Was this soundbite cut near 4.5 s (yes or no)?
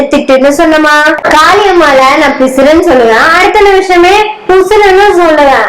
no